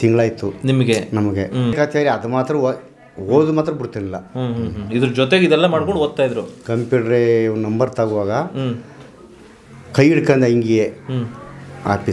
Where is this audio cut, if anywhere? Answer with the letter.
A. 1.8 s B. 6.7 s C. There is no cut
A